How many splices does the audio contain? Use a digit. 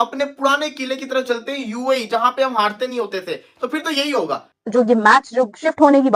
1